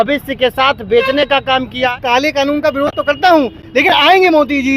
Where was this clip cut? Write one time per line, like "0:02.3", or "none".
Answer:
0:01.8